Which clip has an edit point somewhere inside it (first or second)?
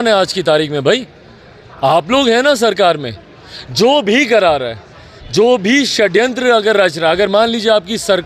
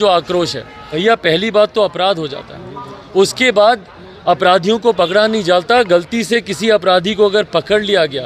second